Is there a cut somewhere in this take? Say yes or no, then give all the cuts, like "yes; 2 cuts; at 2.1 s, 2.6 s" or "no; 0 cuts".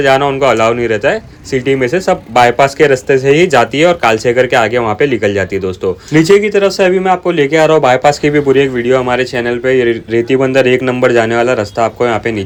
no; 0 cuts